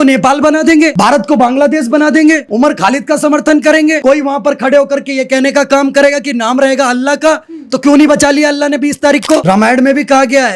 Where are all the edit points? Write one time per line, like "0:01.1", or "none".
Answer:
0:00.9
0:02.5
0:04.0
0:09.4